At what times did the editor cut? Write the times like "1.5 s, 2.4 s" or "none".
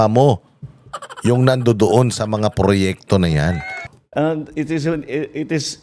3.9 s